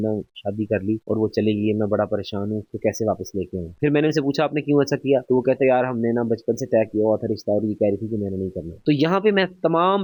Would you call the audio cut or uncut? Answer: uncut